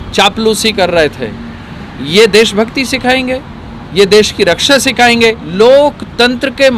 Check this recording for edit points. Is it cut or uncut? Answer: cut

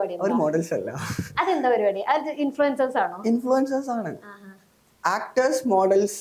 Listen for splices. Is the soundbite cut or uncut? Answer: uncut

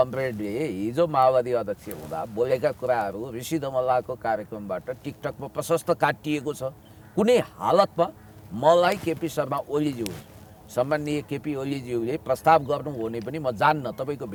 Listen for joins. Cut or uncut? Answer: uncut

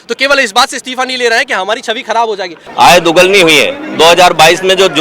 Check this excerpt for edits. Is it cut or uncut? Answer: cut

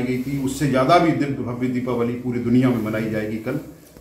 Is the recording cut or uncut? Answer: uncut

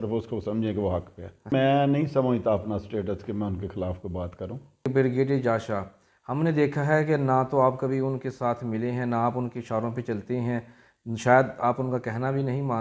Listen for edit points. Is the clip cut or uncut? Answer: cut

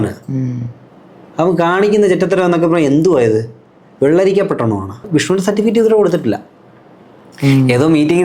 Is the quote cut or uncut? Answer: cut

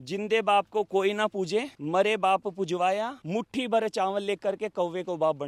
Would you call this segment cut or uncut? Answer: uncut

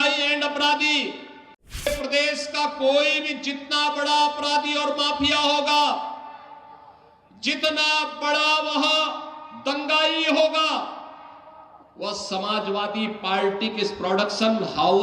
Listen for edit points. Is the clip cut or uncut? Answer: cut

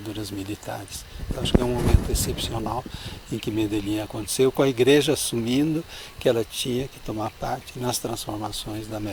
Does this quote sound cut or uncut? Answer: uncut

